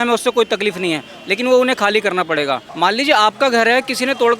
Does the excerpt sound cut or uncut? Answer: cut